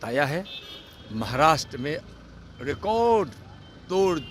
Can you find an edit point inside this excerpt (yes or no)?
no